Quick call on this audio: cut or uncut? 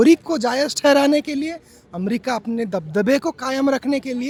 uncut